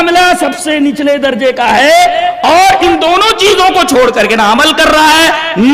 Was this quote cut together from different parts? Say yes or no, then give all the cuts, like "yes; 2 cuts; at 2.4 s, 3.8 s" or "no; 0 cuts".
no; 0 cuts